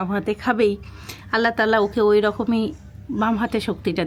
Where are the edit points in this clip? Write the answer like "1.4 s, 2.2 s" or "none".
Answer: none